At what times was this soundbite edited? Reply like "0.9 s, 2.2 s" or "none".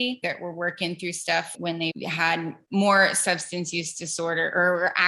1.6 s